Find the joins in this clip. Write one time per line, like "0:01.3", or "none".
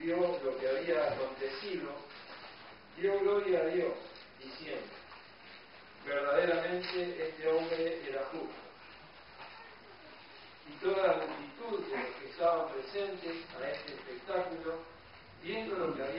0:01.1

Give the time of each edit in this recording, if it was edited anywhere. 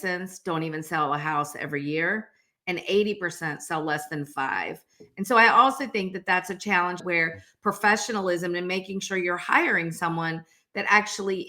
0:07.0

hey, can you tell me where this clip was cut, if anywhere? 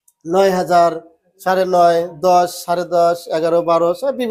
none

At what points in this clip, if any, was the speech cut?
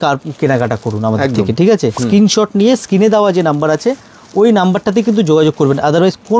0:02.0

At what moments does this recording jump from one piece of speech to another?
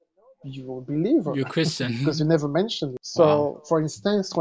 0:03.0

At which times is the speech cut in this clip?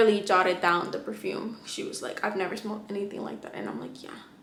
none

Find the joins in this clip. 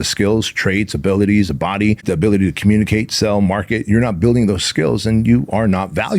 0:02.0

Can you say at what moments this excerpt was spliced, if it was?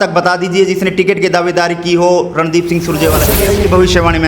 0:03.3

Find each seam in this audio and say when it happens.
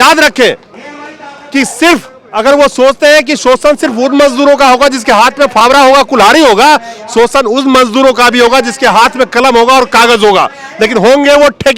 none

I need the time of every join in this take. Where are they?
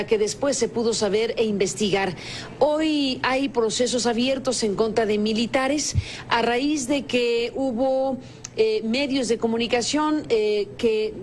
0:02.5

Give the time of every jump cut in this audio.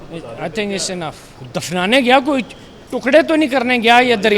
0:01.3

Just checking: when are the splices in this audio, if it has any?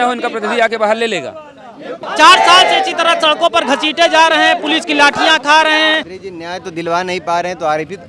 0:02.0
0:06.1

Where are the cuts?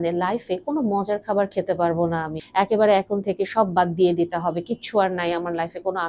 0:02.4

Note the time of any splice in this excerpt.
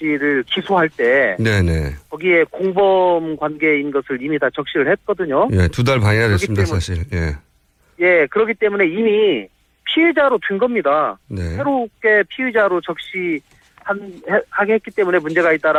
none

